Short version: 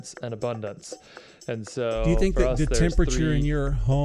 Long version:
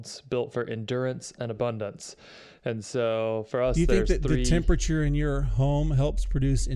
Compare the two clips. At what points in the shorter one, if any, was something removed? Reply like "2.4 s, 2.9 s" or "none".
2.1 s